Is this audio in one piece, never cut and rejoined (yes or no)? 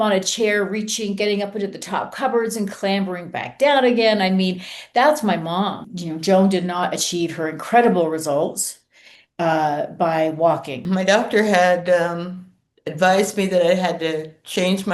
no